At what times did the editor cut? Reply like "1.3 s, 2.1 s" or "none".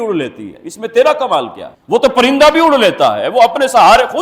none